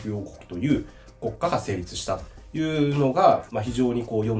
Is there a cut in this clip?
no; 0 cuts

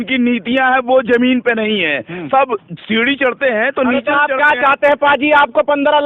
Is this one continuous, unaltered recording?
yes; 0 cuts

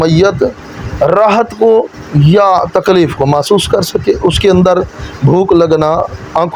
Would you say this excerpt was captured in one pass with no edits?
yes; 0 cuts

